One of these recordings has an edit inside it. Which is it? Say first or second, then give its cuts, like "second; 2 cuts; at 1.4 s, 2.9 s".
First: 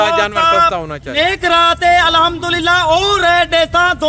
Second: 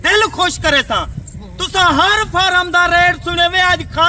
first; 1 cut; at 1.1 s